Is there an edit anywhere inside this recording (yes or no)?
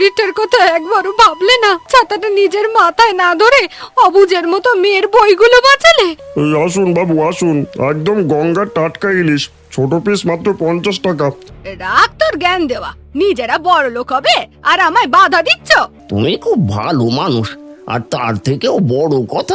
yes